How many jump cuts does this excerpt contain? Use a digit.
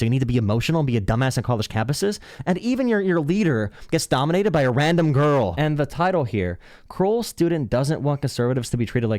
1